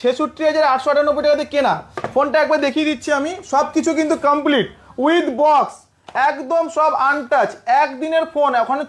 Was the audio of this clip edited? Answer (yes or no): no